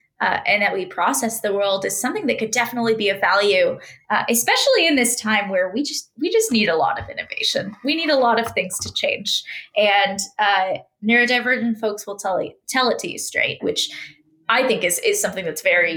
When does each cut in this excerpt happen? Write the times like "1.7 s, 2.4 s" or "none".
13.6 s